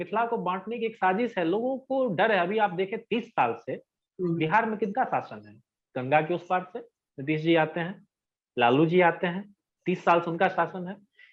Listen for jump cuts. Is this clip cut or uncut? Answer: uncut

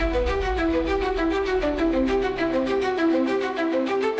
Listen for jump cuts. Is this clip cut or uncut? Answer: uncut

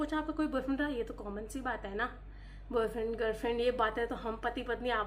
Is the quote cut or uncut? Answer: uncut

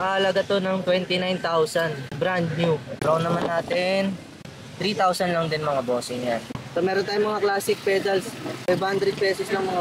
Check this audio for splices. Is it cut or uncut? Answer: uncut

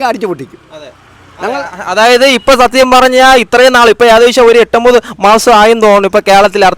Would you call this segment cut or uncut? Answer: uncut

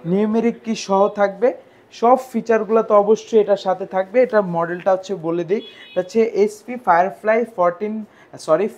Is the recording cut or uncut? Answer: uncut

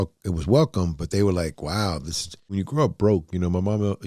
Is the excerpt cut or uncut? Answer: cut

